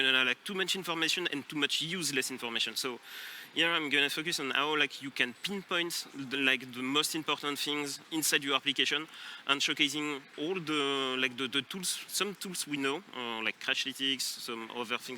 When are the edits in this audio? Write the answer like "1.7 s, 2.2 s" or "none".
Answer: 8.0 s, 10.3 s